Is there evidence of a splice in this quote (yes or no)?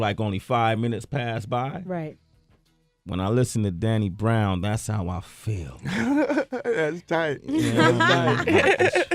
no